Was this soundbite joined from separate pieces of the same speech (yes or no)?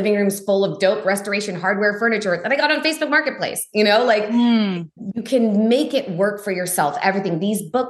no